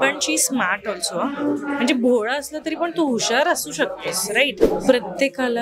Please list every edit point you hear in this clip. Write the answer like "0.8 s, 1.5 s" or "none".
4.6 s